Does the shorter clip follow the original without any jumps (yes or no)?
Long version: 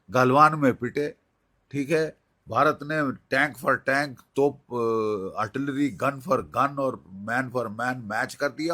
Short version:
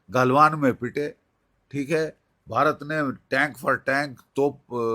yes